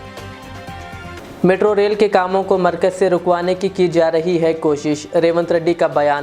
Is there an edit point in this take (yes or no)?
yes